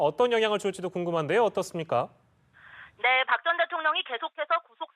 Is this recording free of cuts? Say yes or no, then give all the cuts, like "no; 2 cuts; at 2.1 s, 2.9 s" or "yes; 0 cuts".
no; 1 cut; at 1.7 s